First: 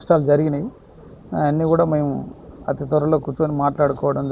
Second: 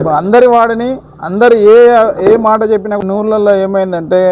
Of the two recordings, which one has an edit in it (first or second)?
second